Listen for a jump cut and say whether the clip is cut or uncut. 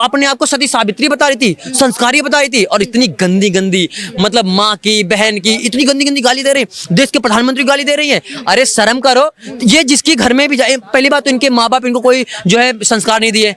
uncut